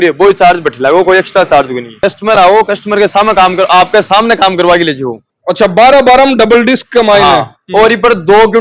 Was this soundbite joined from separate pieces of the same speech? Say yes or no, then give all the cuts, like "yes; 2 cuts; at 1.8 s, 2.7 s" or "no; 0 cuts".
yes; 2 cuts; at 1.9 s, 5.2 s